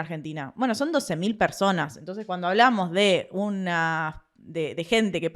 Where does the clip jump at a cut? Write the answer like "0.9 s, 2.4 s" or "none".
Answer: none